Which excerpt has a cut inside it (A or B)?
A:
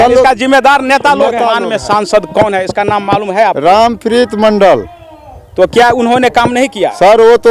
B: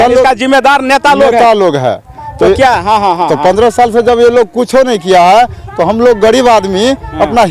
A